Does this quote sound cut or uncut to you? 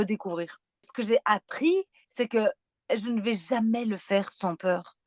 cut